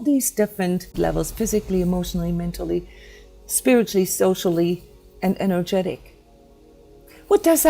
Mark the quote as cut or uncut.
cut